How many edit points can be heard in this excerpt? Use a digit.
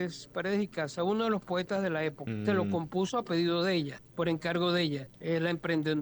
3